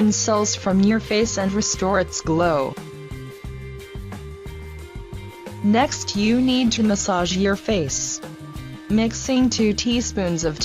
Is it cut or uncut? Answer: cut